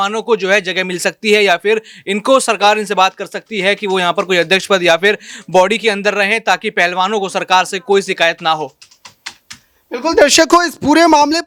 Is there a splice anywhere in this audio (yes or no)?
no